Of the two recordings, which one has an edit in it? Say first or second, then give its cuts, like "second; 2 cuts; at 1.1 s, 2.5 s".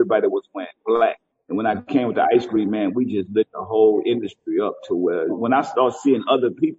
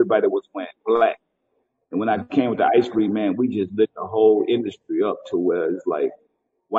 first; 2 cuts; at 1.3 s, 5.4 s